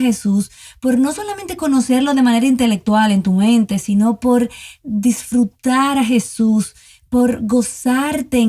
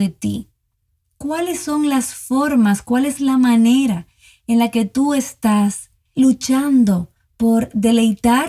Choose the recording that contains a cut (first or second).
second